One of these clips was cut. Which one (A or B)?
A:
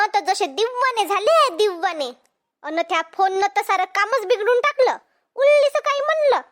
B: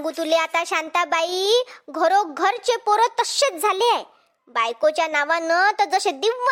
A